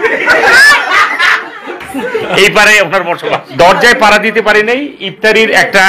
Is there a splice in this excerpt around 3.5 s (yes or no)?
yes